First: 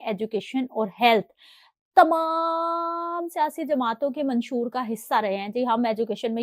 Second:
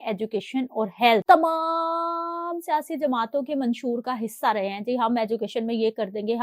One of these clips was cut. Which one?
second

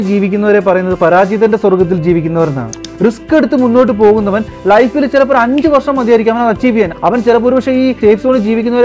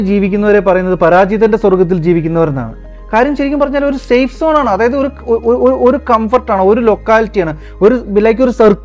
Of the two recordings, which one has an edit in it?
first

